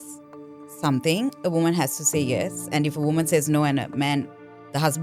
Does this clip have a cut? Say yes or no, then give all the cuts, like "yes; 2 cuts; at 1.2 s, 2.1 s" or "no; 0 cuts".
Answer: no; 0 cuts